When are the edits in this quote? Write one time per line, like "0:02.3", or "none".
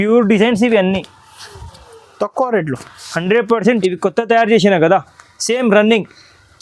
0:03.8

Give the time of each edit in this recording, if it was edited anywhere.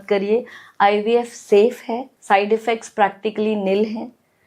0:02.1

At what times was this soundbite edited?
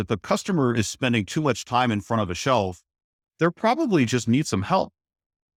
none

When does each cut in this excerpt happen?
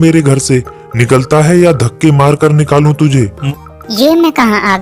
0:03.4

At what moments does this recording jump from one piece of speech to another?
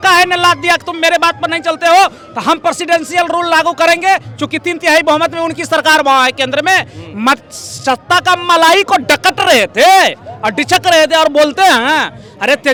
none

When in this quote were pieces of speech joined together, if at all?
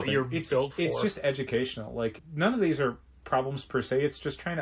0:02.2

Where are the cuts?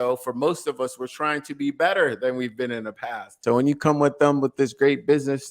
0:03.3

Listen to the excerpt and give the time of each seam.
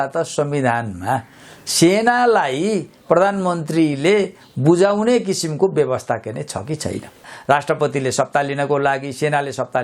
0:07.3

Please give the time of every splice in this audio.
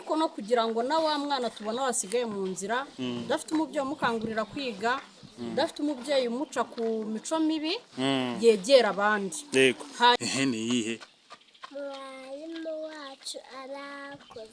0:10.2

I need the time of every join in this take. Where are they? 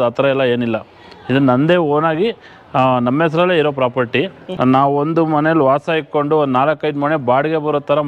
0:04.4

